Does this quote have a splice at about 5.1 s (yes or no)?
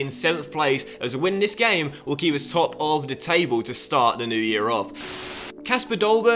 yes